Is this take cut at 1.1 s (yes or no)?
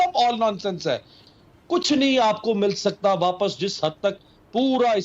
yes